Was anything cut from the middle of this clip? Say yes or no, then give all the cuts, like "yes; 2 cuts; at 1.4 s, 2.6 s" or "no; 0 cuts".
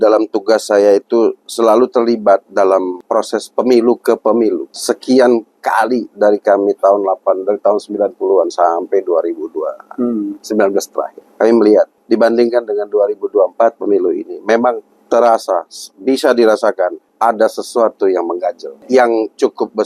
yes; 7 cuts; at 3.0 s, 4.7 s, 11.2 s, 12.0 s, 14.9 s, 17.0 s, 18.7 s